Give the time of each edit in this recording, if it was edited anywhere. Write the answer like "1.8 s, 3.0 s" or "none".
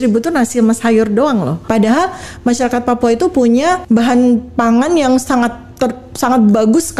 1.6 s, 3.8 s